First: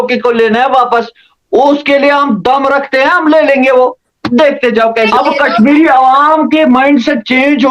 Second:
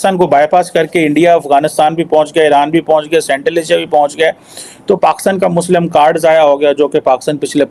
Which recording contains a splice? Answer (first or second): first